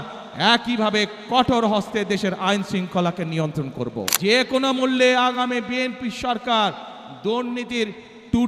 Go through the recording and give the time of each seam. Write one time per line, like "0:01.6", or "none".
0:04.0